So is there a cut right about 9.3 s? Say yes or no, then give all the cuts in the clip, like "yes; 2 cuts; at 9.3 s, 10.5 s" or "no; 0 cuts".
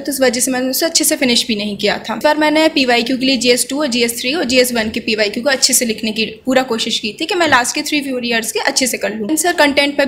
yes; 2 cuts; at 2.2 s, 9.3 s